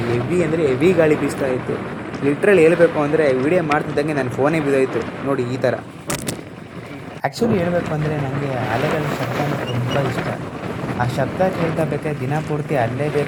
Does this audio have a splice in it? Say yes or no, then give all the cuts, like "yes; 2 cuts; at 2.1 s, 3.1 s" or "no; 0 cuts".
no; 0 cuts